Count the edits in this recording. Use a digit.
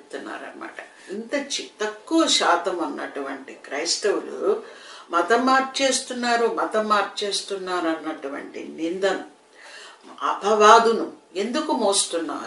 1